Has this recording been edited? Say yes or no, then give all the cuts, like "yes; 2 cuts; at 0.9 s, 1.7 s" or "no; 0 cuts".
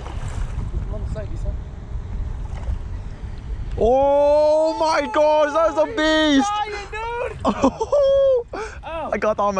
no; 0 cuts